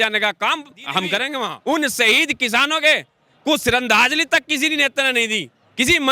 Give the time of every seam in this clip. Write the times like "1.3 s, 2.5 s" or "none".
1.5 s

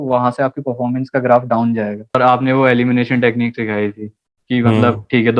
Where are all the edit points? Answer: 2.1 s

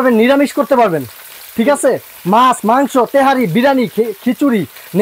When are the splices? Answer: none

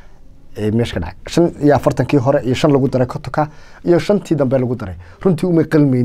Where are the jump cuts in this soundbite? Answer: none

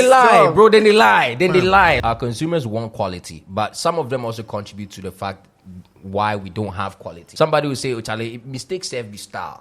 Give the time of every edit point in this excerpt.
2.0 s, 7.2 s

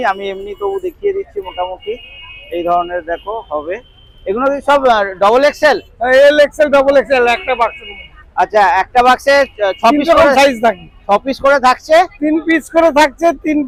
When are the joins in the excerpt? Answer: none

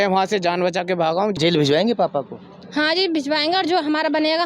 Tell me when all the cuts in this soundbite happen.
1.3 s

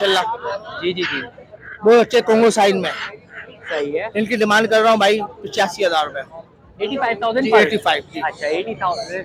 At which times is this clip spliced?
none

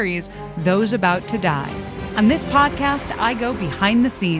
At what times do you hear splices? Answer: 2.0 s

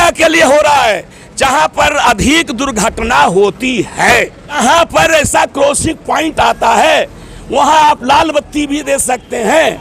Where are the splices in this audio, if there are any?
4.5 s

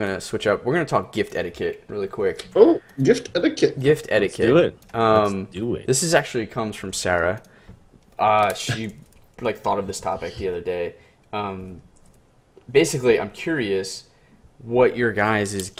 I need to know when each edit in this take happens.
none

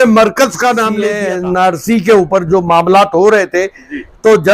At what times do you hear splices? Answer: 1.2 s

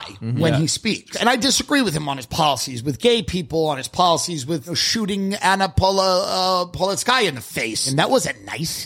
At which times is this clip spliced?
1.1 s, 4.8 s, 7.9 s

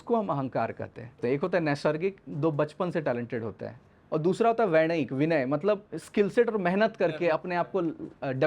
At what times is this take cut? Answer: 1.2 s

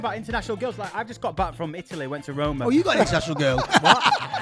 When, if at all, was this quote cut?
none

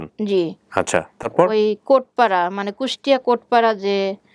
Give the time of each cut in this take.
none

